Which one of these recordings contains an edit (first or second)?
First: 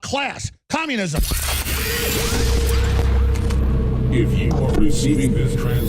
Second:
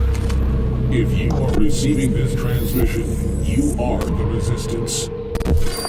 first